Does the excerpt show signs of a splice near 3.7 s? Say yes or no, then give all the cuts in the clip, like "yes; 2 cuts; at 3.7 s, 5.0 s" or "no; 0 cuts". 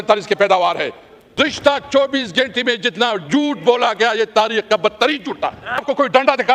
no; 2 cuts; at 1.4 s, 5.8 s